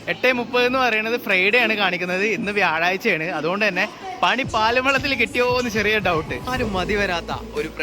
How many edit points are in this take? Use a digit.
1